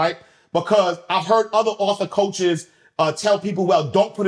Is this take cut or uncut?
uncut